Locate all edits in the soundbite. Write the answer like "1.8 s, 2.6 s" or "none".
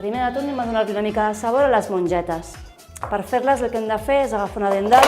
4.0 s